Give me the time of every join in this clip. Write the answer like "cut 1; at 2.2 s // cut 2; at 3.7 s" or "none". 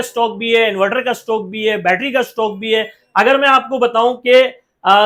none